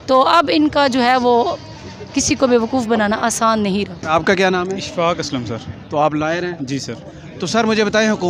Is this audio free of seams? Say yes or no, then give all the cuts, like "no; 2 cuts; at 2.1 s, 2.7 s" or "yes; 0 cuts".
yes; 0 cuts